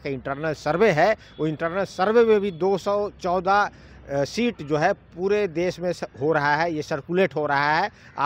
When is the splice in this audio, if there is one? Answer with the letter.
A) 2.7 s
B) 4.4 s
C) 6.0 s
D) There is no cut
D